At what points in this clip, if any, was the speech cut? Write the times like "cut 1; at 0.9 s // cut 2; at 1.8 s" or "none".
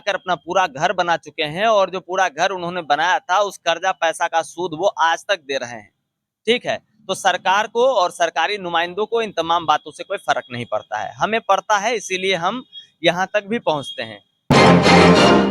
cut 1; at 14.3 s